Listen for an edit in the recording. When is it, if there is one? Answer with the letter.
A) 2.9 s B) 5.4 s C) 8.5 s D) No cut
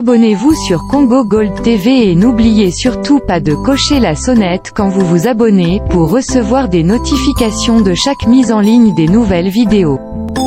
D